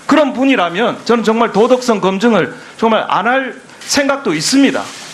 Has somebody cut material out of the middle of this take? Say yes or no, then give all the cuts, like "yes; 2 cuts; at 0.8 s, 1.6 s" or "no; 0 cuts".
yes; 1 cut; at 3.3 s